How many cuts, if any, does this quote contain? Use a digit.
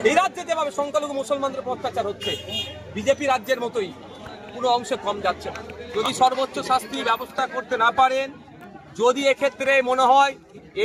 1